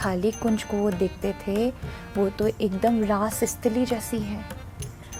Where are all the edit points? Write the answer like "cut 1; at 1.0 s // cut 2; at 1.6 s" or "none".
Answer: none

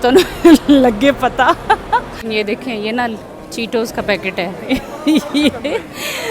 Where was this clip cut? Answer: cut 1; at 2.2 s

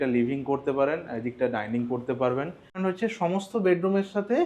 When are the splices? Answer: cut 1; at 2.8 s

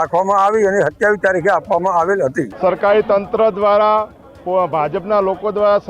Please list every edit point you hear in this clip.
cut 1; at 2.5 s

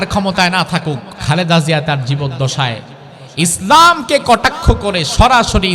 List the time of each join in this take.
cut 1; at 1.1 s

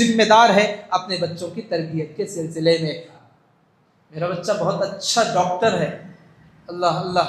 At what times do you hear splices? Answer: cut 1; at 3.1 s

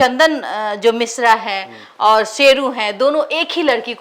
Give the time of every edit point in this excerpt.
none

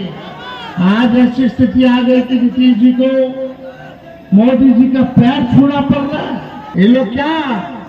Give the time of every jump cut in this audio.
cut 1; at 6.6 s

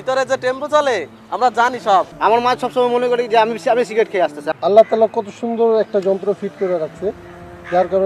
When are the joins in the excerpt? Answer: cut 1; at 2.1 s // cut 2; at 4.5 s

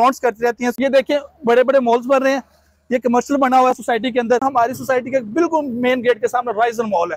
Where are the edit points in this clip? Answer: cut 1; at 0.8 s // cut 2; at 4.4 s

